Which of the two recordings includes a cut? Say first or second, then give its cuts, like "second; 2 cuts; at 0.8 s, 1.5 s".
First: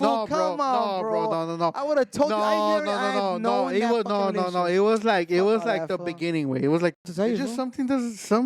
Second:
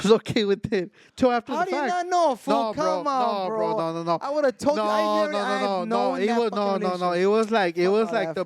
first; 1 cut; at 7.1 s